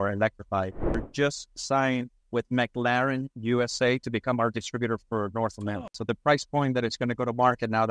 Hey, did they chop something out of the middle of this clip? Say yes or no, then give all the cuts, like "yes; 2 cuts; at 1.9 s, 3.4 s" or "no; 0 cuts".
yes; 3 cuts; at 1.0 s, 2.2 s, 5.9 s